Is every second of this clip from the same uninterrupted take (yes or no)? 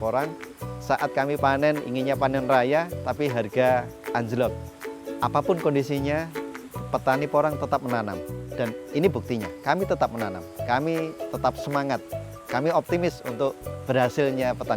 no